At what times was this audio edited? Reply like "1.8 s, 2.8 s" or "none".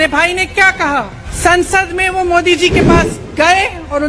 1.2 s